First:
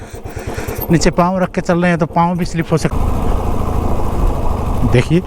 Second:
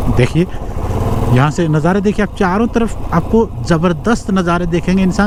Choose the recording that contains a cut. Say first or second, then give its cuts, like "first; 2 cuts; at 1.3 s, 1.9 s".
first; 1 cut; at 2.9 s